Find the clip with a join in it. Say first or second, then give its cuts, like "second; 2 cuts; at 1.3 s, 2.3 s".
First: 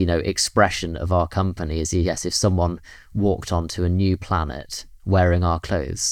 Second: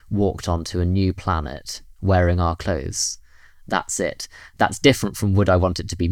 second; 1 cut; at 4.4 s